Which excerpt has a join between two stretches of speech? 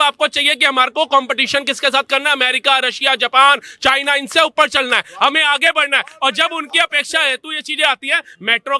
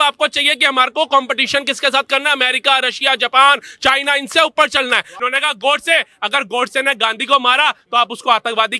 second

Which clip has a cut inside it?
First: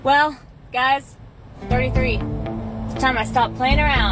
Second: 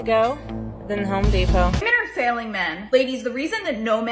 second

